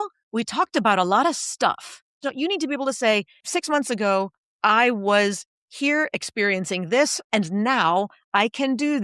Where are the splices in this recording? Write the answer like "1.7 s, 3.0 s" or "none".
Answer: 2.2 s, 3.4 s, 7.2 s